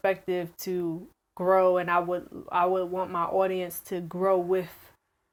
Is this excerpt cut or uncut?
uncut